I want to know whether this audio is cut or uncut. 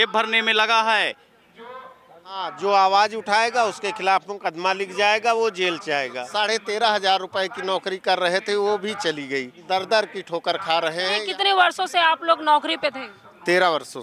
cut